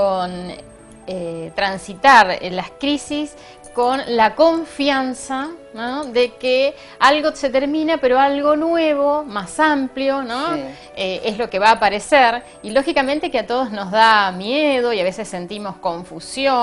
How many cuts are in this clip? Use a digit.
0